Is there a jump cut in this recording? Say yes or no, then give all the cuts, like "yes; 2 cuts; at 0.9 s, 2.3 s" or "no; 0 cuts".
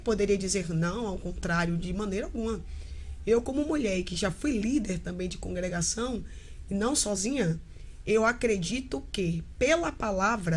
no; 0 cuts